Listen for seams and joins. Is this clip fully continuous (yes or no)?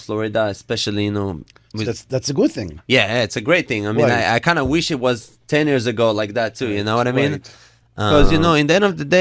no